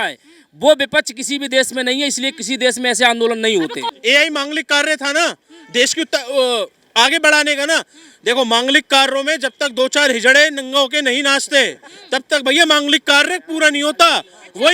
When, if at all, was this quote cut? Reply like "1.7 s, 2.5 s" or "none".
3.8 s